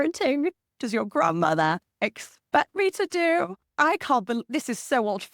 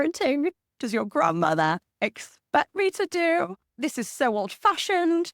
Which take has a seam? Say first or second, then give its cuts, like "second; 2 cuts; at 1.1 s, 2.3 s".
second; 1 cut; at 3.7 s